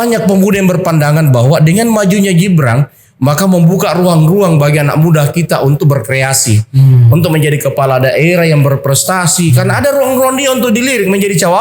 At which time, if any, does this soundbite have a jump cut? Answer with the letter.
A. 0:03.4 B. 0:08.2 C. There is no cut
C